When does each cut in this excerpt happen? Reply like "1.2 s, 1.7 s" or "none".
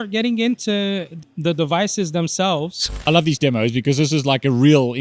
3.0 s